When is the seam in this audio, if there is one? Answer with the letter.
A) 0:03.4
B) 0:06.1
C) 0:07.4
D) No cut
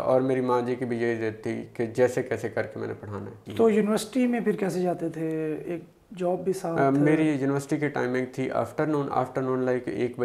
A